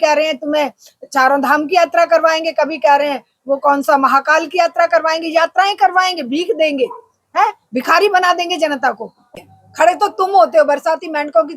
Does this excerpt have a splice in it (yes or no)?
yes